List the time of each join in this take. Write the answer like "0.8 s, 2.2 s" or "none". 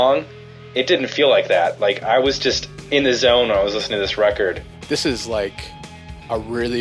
2.7 s, 4.7 s